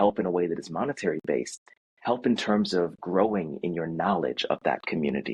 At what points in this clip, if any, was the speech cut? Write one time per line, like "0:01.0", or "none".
none